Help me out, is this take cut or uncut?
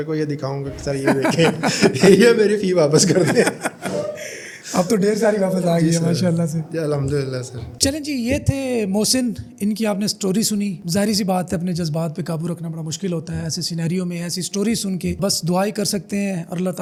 uncut